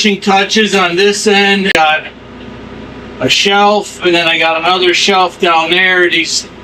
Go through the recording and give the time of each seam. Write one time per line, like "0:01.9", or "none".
0:01.7